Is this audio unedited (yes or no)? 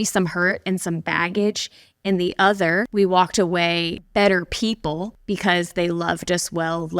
no